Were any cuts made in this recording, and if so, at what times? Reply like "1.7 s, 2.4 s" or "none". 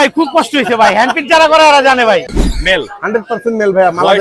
2.4 s